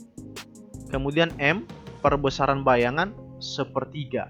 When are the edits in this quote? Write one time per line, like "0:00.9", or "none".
0:00.9